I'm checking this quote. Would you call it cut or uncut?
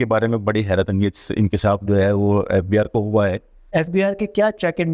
cut